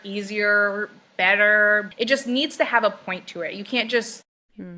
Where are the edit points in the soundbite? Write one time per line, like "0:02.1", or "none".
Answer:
0:01.9